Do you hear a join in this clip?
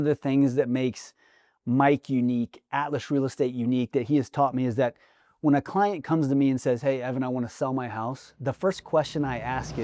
no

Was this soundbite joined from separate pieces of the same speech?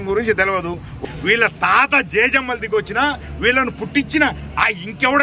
yes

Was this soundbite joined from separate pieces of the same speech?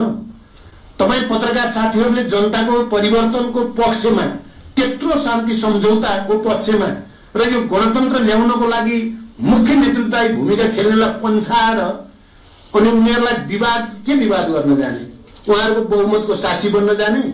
no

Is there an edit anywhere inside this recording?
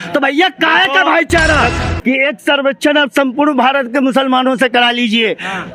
yes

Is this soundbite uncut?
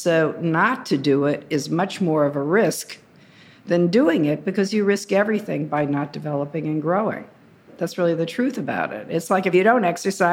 no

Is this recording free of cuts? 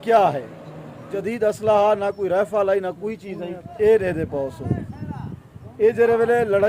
no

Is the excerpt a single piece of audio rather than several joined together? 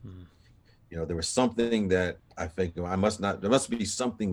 yes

